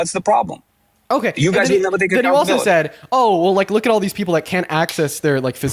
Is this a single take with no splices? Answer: yes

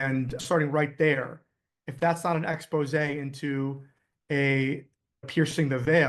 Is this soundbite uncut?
yes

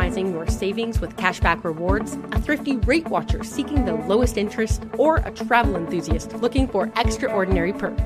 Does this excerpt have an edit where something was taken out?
no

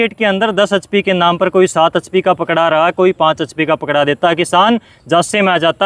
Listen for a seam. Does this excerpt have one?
no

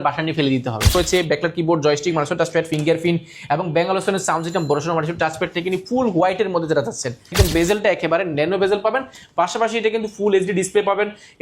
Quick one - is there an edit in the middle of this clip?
yes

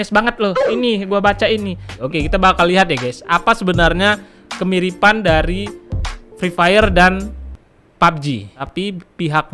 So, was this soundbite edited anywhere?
yes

